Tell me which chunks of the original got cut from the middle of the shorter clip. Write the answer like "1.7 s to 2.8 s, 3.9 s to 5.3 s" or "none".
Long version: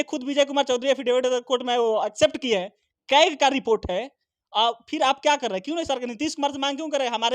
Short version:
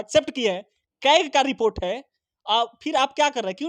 none

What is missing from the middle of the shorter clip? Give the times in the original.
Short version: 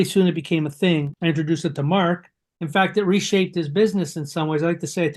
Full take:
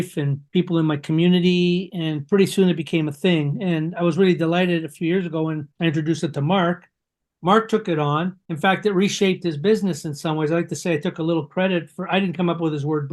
3.5 s to 5.7 s, 7.1 s to 8.4 s

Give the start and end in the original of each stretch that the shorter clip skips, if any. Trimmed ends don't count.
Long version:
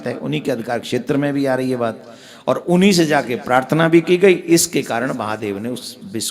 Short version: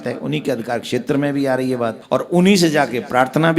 2.0 s to 2.3 s

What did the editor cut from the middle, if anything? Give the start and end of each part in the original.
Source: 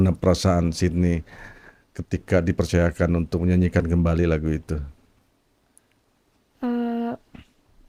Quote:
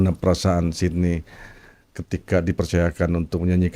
none

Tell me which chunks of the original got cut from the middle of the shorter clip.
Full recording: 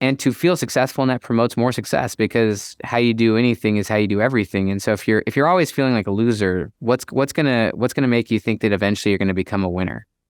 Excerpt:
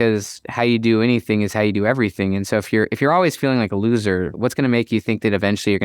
6.7 s to 7.7 s

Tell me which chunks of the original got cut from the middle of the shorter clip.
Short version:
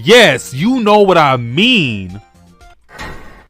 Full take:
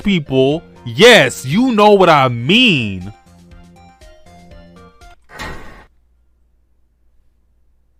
3.5 s to 5.0 s

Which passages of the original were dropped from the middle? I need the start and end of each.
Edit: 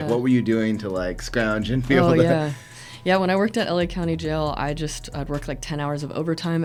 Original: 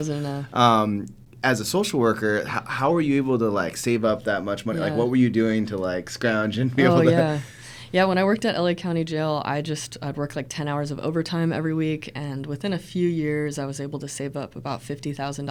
none

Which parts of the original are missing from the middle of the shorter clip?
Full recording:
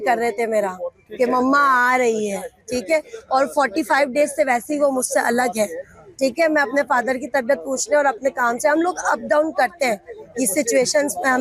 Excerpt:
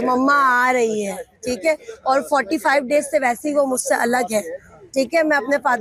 none

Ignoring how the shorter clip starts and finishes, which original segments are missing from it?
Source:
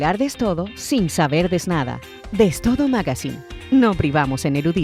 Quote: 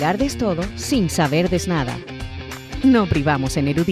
2.3 s to 3.1 s

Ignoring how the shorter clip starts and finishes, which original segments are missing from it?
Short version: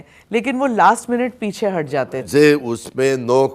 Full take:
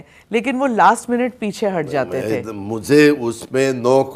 2.2 s to 2.7 s

